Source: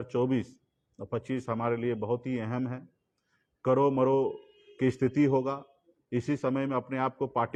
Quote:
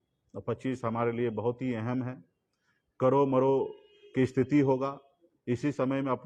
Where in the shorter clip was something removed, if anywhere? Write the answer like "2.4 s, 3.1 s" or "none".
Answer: none